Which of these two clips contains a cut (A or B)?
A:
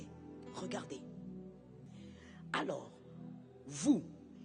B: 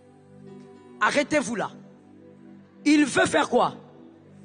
A